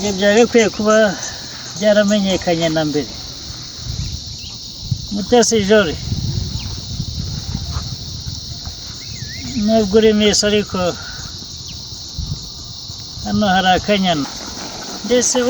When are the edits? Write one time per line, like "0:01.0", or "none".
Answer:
0:14.2